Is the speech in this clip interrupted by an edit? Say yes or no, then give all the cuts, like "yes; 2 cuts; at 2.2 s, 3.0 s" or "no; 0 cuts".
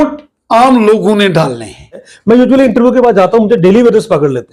yes; 1 cut; at 2.1 s